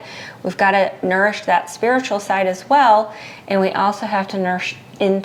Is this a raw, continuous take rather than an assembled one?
yes; 0 cuts

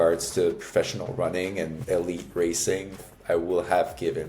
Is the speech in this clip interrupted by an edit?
yes; 2 cuts; at 1.8 s, 3.0 s

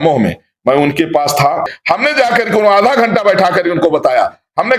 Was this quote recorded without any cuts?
no; 1 cut; at 1.7 s

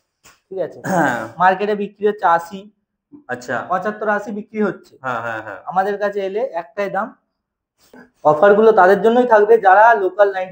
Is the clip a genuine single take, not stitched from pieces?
no; 1 cut; at 7.9 s

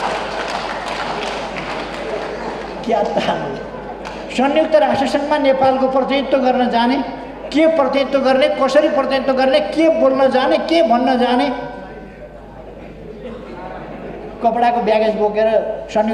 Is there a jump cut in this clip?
no; 0 cuts

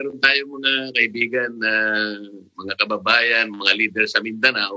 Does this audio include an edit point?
no; 0 cuts

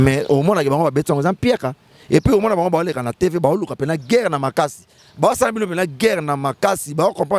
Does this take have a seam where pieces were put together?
no; 0 cuts

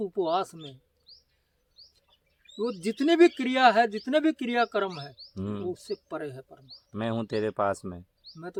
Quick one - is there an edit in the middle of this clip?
no; 0 cuts

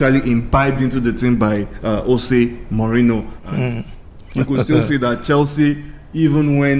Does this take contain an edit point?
no; 0 cuts

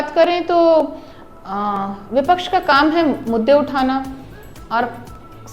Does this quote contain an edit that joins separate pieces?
no; 0 cuts

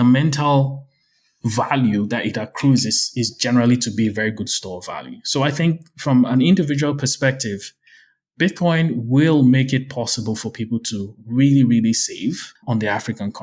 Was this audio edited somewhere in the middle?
yes; 1 cut; at 12.5 s

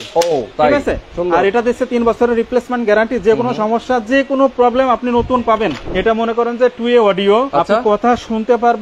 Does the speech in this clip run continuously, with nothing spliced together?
no; 2 cuts; at 5.8 s, 7.5 s

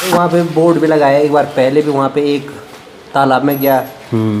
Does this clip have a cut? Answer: no; 0 cuts

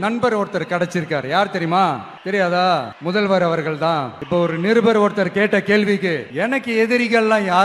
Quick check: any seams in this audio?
yes; 4 cuts; at 2.1 s, 2.9 s, 4.2 s, 6.3 s

